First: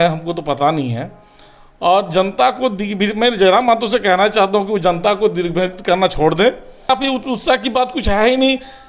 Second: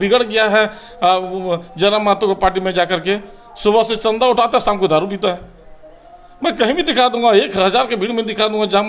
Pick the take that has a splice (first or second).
first